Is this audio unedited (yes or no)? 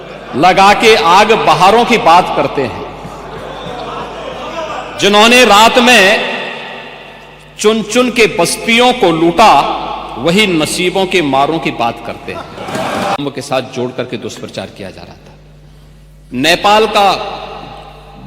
no